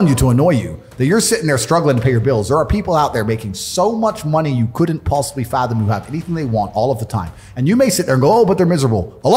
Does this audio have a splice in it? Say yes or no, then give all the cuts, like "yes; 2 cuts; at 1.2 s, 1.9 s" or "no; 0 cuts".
no; 0 cuts